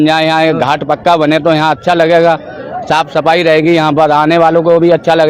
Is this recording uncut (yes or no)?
yes